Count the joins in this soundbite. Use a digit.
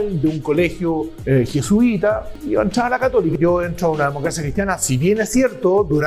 3